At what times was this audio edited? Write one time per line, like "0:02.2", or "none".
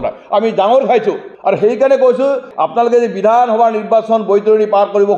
0:02.5